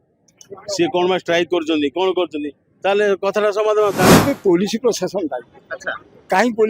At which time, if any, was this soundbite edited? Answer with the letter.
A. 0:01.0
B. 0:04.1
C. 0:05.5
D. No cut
B